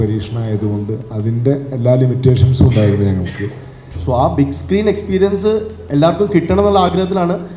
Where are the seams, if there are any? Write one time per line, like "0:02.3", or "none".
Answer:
0:04.0